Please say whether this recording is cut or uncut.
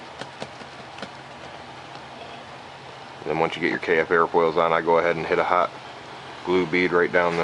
uncut